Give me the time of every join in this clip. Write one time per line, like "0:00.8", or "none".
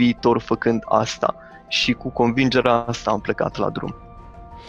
none